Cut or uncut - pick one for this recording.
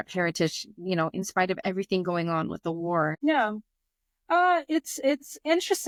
uncut